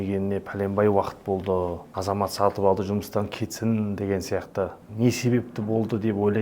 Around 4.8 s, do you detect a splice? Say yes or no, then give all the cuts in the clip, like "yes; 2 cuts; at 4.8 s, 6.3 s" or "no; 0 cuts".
yes; 2 cuts; at 1.9 s, 4.8 s